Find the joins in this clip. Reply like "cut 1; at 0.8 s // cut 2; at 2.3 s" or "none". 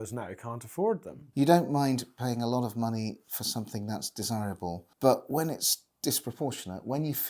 cut 1; at 1.1 s // cut 2; at 4.9 s

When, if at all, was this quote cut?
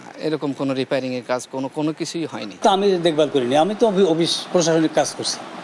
none

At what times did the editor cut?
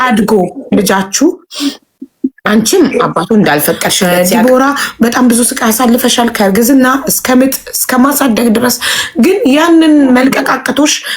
cut 1; at 3.9 s

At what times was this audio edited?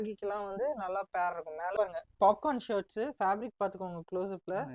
cut 1; at 1.7 s

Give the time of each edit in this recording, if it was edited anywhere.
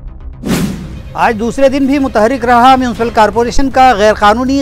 cut 1; at 0.9 s

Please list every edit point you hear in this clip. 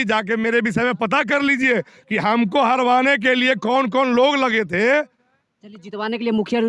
none

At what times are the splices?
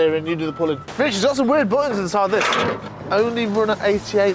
cut 1; at 0.9 s // cut 2; at 2.9 s

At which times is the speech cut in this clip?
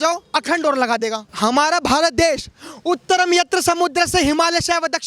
cut 1; at 1.3 s

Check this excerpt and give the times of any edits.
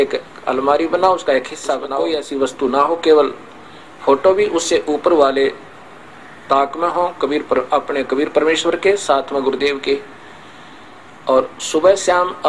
cut 1; at 1.9 s

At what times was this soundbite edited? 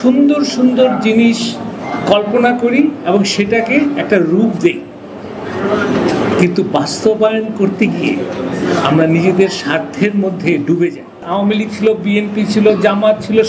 cut 1; at 11.2 s

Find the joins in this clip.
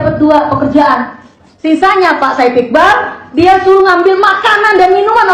none

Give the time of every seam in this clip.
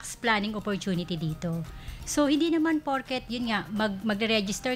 none

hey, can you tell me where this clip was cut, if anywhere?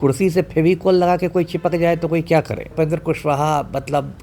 cut 1; at 2.7 s

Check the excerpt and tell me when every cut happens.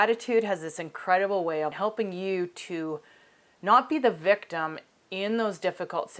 cut 1; at 1.7 s

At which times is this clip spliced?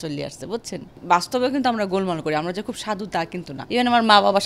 cut 1; at 1.0 s // cut 2; at 3.5 s

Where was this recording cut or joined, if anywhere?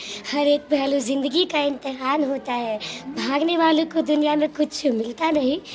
none

